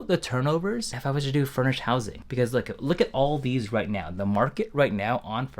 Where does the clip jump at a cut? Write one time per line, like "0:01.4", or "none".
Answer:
0:00.9
0:02.2